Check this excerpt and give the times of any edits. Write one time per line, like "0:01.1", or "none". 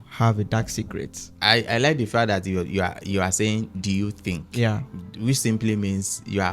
0:01.2